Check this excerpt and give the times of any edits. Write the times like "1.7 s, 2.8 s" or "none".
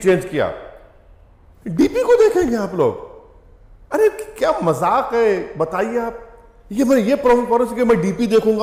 none

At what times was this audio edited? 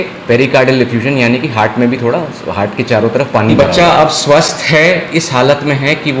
3.5 s

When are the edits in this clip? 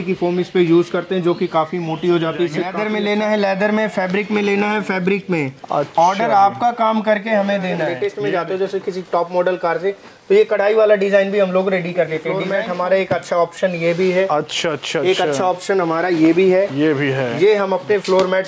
2.7 s, 7.9 s, 12.4 s

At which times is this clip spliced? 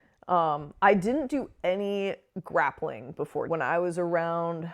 3.5 s

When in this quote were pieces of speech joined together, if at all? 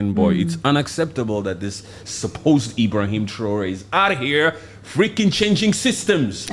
none

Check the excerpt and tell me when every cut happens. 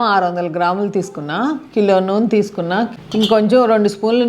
2.9 s

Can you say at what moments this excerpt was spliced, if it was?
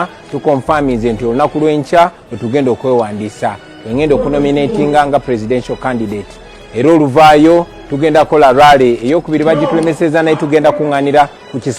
7.3 s

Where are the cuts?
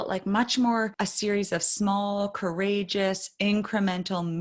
0.9 s

